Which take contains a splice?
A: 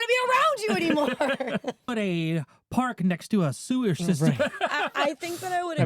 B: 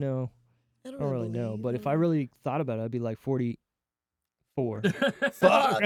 A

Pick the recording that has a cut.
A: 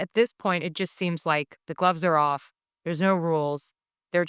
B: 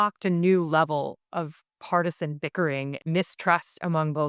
B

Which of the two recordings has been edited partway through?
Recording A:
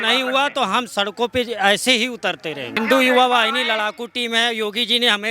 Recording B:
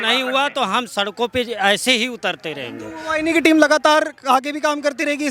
A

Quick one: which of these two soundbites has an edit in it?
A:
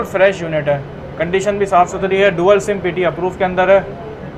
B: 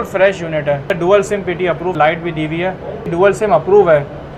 B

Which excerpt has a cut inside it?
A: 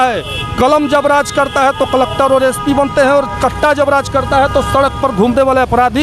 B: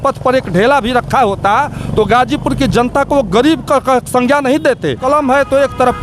B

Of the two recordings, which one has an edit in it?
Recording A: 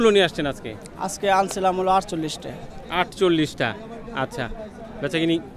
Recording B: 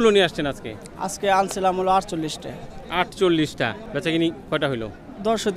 B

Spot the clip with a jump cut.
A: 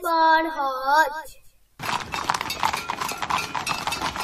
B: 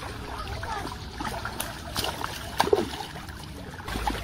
A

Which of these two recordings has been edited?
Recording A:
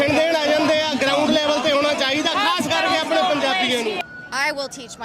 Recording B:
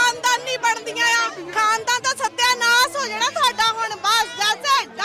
A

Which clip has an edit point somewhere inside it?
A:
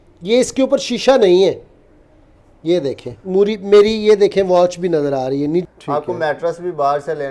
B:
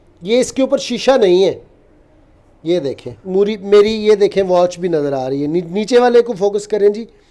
A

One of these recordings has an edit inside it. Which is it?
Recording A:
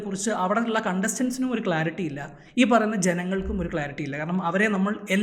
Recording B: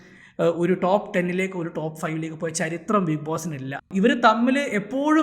B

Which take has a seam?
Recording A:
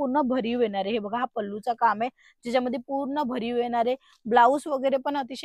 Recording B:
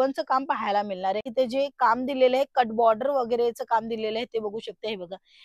B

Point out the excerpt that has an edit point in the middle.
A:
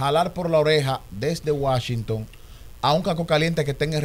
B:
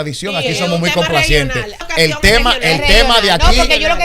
B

